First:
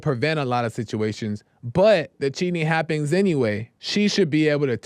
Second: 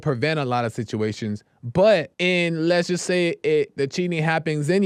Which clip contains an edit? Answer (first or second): first